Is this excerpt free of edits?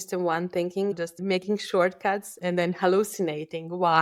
no; 2 cuts; at 1.2 s, 2.3 s

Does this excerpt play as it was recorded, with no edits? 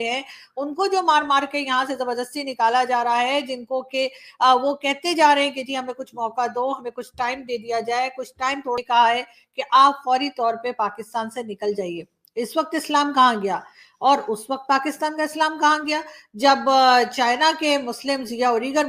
no; 1 cut; at 8.8 s

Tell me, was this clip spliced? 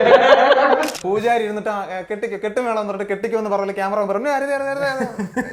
yes; 1 cut; at 0.9 s

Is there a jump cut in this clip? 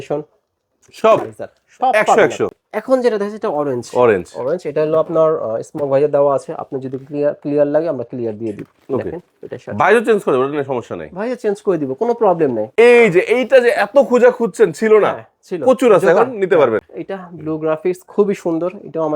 yes; 3 cuts; at 2.6 s, 12.6 s, 16.9 s

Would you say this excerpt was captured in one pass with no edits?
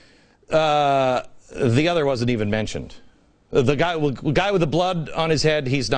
yes; 0 cuts

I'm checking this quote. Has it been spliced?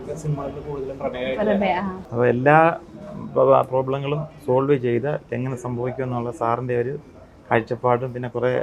yes; 1 cut; at 2.0 s

